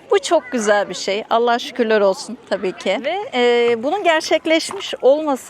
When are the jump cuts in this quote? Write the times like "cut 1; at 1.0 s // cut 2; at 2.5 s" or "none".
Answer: cut 1; at 3.2 s

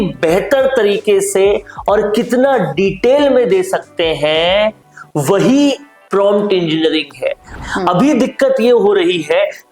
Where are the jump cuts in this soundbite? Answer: cut 1; at 7.5 s

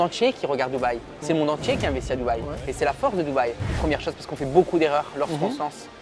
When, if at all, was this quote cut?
cut 1; at 3.6 s

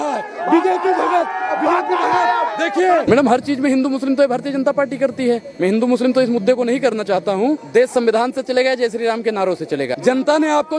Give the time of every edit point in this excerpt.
cut 1; at 3.0 s // cut 2; at 7.6 s // cut 3; at 9.9 s

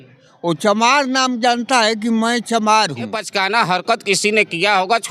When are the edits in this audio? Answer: cut 1; at 3.2 s

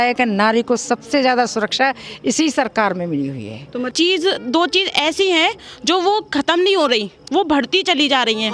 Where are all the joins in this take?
cut 1; at 3.9 s

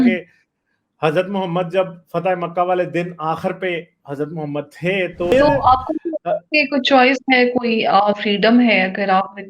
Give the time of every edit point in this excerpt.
cut 1; at 5.3 s

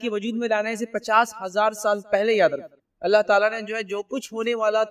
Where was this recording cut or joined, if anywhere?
none

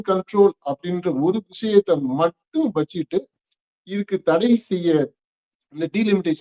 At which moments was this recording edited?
none

